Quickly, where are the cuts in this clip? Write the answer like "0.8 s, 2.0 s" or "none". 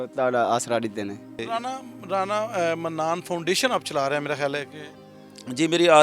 none